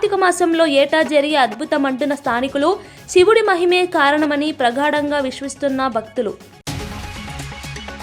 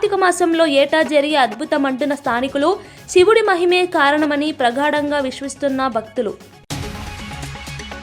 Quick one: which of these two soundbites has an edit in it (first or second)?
second